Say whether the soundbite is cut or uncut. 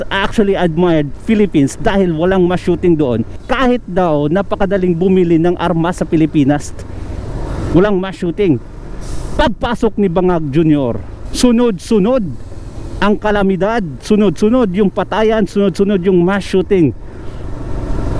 uncut